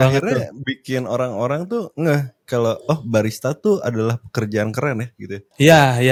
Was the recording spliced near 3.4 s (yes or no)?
no